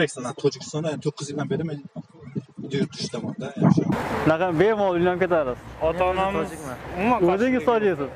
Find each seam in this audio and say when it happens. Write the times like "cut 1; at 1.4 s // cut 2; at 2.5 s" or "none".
cut 1; at 3.9 s